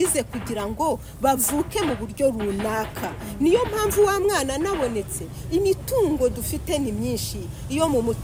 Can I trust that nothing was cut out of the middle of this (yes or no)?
yes